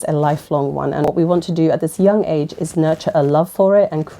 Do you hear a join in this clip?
yes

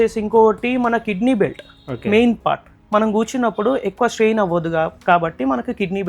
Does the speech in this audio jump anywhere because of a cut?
no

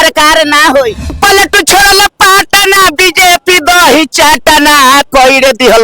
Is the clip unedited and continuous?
no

